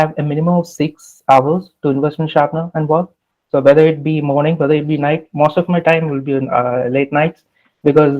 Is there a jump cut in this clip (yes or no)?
no